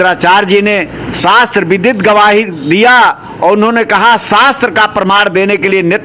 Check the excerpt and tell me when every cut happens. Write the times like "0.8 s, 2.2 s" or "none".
none